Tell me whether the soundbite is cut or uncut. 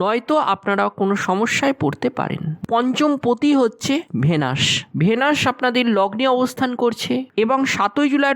cut